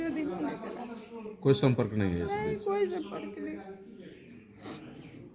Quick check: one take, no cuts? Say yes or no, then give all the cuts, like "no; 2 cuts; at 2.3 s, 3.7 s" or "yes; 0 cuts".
yes; 0 cuts